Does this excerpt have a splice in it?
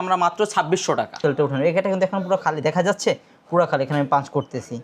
yes; 1 cut; at 1.2 s

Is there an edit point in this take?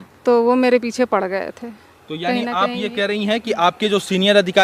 no; 0 cuts

